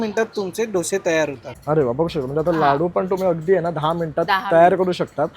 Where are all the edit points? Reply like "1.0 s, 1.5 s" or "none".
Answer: 1.5 s